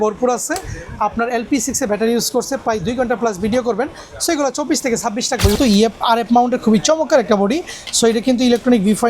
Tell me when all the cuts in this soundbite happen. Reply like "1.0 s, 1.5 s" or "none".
5.6 s